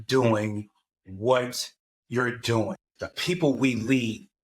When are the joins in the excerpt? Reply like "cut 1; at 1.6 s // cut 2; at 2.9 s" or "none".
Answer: cut 1; at 2.8 s